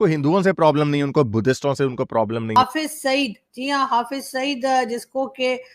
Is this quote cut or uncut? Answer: cut